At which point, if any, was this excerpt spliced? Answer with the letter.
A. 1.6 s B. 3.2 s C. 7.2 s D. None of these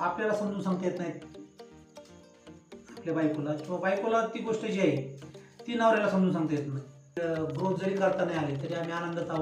C